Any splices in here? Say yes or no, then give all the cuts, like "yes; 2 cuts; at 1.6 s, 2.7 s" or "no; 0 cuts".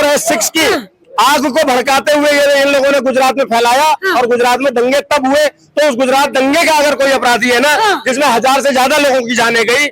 no; 0 cuts